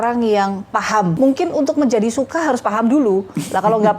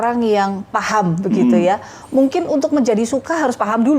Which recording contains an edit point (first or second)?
first